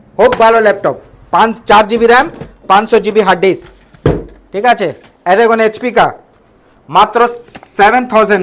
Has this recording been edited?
no; 0 cuts

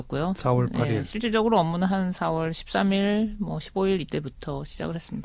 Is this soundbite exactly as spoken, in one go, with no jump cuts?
no; 1 cut; at 1.5 s

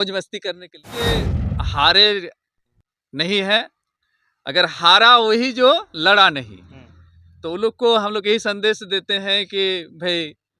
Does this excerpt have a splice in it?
yes; 1 cut; at 1.1 s

